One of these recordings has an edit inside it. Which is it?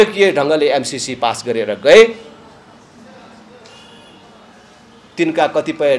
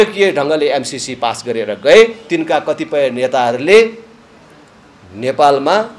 second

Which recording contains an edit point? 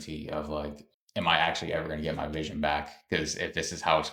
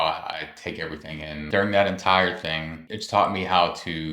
second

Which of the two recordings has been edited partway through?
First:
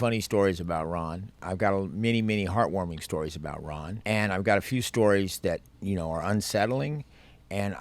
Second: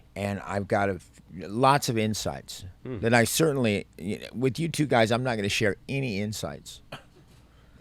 first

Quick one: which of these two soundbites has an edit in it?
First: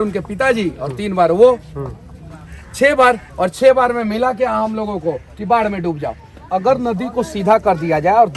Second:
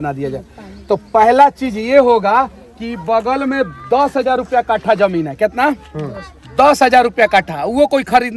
first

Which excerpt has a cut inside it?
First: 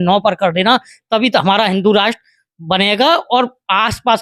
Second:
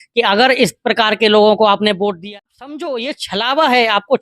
second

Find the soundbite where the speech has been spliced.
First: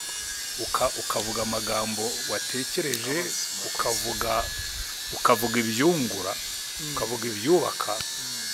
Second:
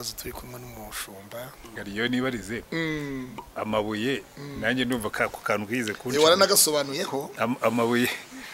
second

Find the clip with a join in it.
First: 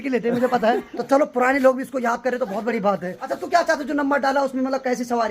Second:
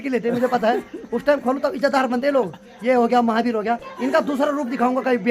first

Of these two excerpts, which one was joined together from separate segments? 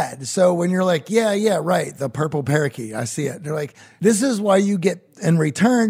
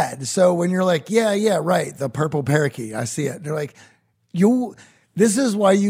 first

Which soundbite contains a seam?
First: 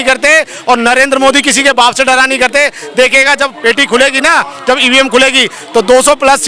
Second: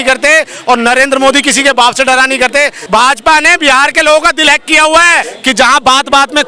second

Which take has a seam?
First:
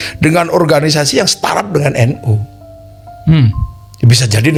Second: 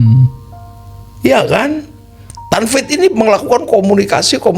second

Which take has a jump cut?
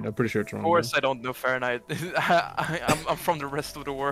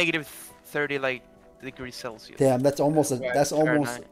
second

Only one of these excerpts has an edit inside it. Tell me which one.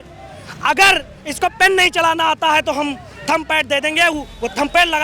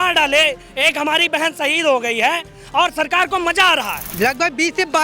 second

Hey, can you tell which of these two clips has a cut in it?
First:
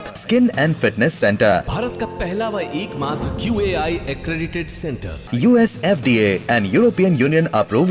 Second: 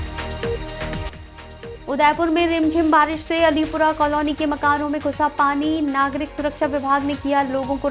second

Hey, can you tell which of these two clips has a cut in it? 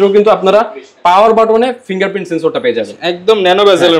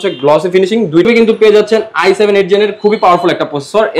second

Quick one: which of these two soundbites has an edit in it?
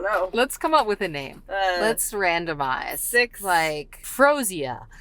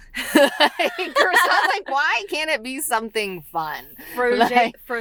first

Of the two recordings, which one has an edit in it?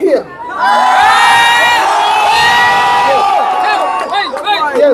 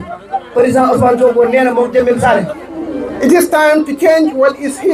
second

